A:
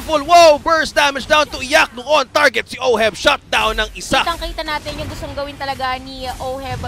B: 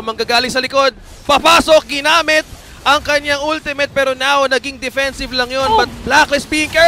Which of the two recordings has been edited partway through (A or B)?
A